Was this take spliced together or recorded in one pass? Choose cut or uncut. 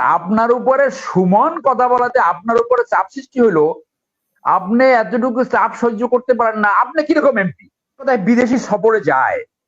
cut